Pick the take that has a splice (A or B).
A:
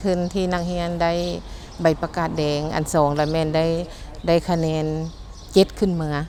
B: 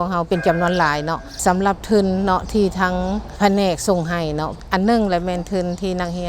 B